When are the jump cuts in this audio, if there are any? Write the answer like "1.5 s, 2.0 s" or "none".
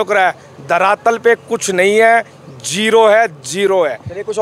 none